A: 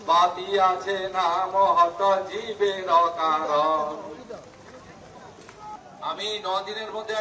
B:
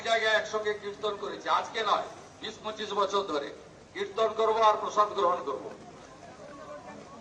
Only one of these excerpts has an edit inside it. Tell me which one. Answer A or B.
A